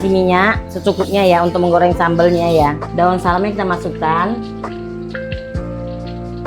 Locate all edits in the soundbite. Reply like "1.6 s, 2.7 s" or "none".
4.8 s